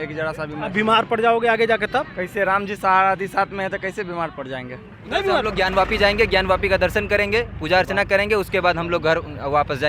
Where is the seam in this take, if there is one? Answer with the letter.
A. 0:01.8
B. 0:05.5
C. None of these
B